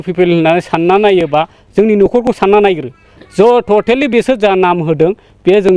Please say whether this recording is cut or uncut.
uncut